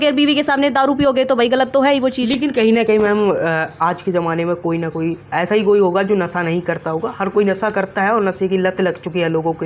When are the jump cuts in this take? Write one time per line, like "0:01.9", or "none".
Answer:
none